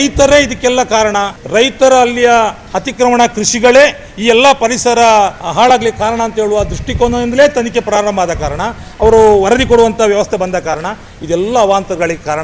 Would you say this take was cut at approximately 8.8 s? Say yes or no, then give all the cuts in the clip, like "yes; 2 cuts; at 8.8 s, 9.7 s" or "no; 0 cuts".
no; 2 cuts; at 1.4 s, 5.4 s